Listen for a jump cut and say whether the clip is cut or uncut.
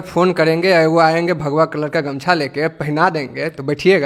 uncut